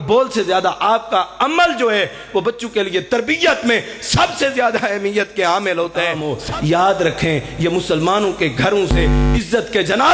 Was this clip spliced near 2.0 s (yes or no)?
no